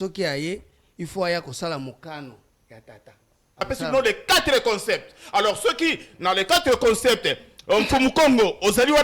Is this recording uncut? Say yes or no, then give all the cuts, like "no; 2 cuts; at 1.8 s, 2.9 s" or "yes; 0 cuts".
no; 1 cut; at 3.7 s